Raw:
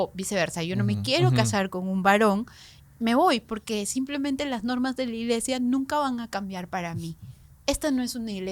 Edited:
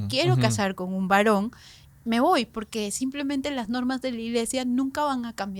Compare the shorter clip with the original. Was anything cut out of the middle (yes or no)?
no